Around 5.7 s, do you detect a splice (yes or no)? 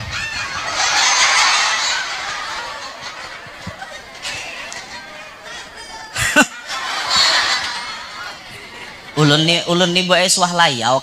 no